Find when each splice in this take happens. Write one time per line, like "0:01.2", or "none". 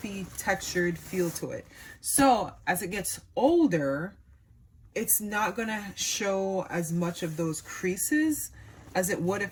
none